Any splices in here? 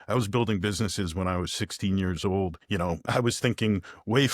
yes; 1 cut; at 2.9 s

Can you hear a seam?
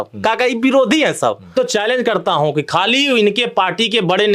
yes; 1 cut; at 1.5 s

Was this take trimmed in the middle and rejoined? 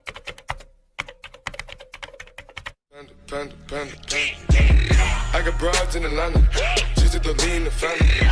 yes; 1 cut; at 2.7 s

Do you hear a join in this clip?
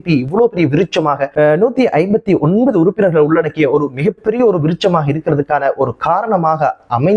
yes; 1 cut; at 1.3 s

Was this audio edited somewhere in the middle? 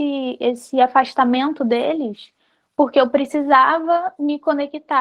no; 0 cuts

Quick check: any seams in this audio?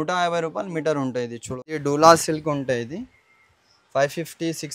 yes; 1 cut; at 1.8 s

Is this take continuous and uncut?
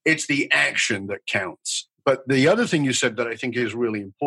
no; 1 cut; at 1.8 s

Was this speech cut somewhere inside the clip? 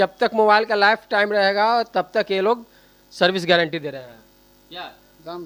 no; 0 cuts

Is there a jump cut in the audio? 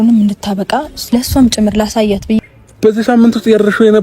yes; 1 cut; at 2.4 s

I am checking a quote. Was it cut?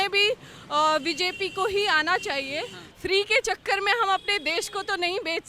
yes; 1 cut; at 2.8 s

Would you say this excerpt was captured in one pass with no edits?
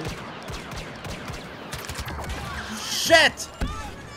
no; 1 cut; at 2.2 s

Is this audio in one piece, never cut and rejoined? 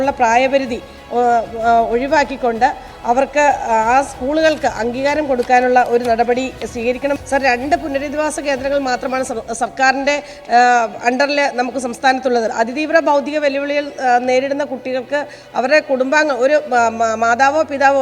yes; 0 cuts

